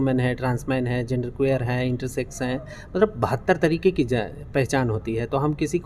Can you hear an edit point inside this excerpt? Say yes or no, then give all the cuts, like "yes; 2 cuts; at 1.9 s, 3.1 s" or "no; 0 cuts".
no; 0 cuts